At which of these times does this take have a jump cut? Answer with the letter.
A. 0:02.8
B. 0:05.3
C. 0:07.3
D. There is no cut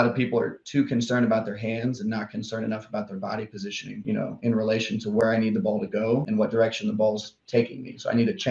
D